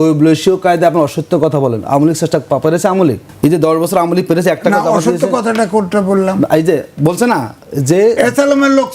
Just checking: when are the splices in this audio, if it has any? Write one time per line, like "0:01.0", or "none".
0:03.3